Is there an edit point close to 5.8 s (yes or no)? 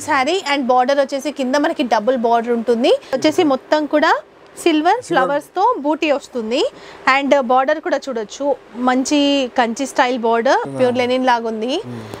no